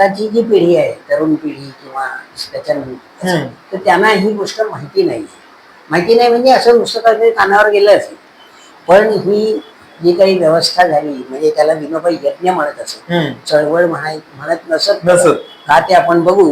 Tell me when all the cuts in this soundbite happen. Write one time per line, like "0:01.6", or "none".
none